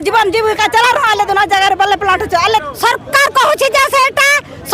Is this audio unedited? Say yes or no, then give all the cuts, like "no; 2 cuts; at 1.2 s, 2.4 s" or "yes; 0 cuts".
no; 1 cut; at 2.6 s